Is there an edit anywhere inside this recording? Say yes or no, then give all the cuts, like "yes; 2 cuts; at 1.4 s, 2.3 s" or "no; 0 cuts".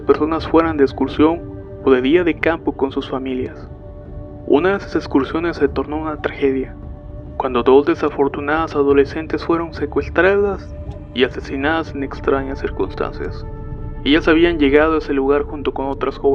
yes; 1 cut; at 15.1 s